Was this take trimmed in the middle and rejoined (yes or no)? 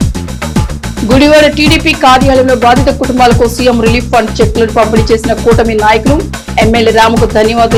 no